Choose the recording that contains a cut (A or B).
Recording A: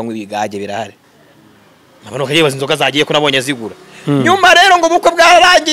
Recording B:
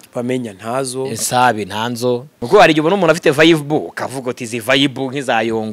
B